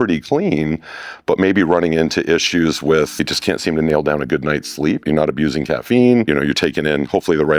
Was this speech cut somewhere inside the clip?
yes; 3 cuts; at 3.2 s, 5.0 s, 6.2 s

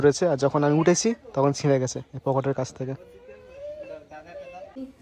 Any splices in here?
no; 0 cuts

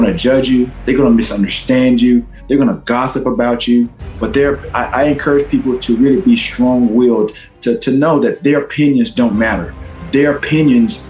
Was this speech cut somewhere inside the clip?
yes; 1 cut; at 9.9 s

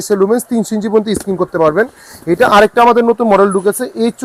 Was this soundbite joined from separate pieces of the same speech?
no; 0 cuts

